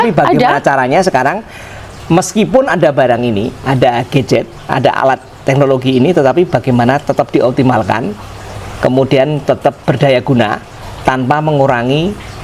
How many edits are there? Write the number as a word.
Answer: zero